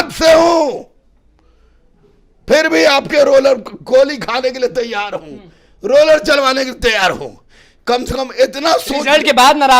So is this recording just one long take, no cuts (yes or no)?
yes